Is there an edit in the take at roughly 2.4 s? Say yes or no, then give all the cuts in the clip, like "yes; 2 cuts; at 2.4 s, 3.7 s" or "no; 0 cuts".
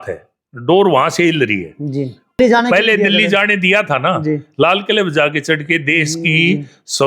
yes; 1 cut; at 2.4 s